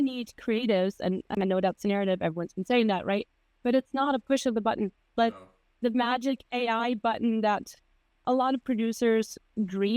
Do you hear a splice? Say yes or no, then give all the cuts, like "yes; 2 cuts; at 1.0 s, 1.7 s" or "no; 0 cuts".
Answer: yes; 1 cut; at 1.3 s